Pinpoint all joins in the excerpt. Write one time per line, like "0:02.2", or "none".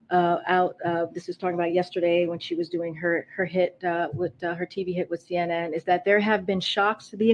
none